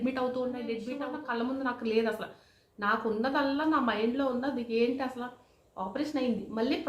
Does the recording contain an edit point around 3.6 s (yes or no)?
no